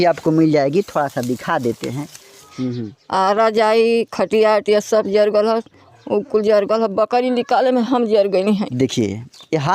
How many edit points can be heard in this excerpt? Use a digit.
2